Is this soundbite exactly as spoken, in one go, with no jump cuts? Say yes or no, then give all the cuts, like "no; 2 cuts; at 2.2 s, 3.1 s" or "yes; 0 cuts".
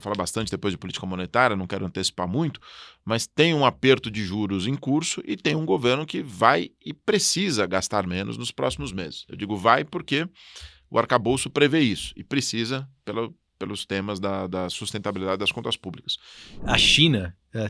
no; 1 cut; at 16.7 s